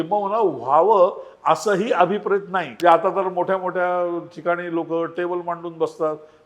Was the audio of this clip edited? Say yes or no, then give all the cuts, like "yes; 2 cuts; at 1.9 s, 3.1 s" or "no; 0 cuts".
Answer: yes; 1 cut; at 2.6 s